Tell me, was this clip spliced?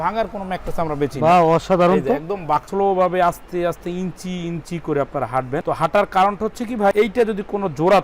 yes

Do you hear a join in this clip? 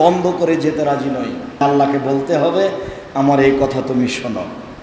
yes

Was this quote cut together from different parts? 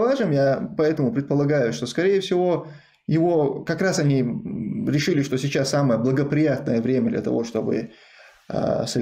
no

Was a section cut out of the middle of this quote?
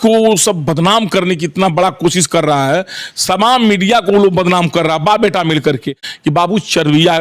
yes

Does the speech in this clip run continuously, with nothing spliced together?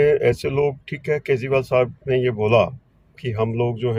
yes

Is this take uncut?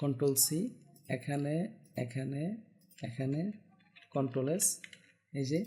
yes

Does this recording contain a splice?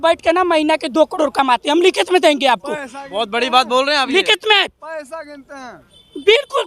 no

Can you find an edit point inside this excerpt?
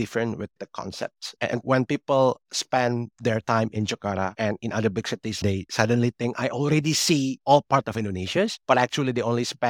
yes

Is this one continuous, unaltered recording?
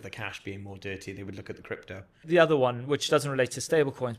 no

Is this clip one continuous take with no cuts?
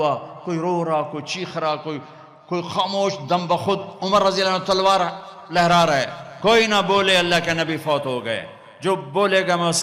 yes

